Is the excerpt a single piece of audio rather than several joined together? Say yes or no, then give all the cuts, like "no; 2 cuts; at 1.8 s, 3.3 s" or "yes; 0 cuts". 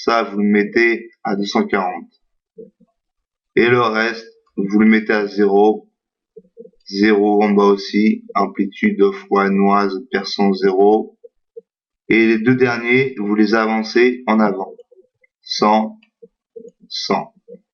no; 1 cut; at 9.7 s